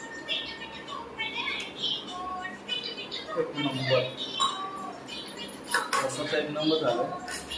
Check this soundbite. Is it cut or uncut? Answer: uncut